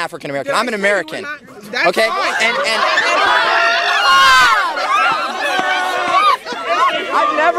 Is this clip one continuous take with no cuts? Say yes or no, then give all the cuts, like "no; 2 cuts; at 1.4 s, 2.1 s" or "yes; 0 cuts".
yes; 0 cuts